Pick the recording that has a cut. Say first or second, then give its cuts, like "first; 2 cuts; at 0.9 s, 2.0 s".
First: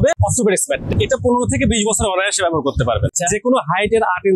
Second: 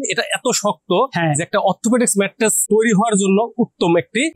first; 2 cuts; at 0.8 s, 3.1 s